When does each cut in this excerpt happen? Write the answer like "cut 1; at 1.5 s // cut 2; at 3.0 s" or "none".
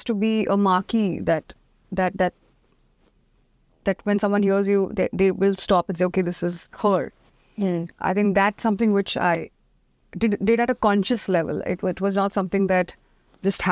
none